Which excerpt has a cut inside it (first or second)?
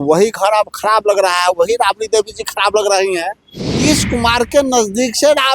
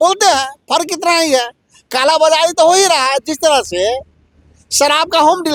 first